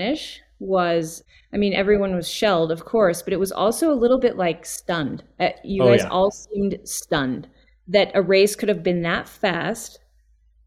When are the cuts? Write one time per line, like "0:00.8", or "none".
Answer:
0:01.2

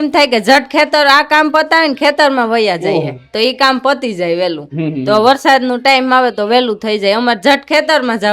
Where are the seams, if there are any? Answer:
none

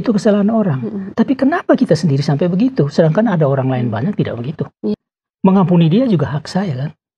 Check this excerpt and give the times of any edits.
0:04.9

